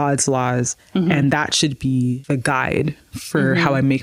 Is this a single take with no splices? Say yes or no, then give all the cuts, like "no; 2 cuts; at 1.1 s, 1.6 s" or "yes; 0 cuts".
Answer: no; 1 cut; at 2.2 s